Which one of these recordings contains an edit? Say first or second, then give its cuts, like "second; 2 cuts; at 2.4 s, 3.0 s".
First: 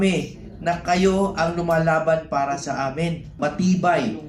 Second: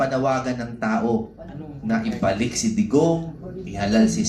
first; 1 cut; at 3.3 s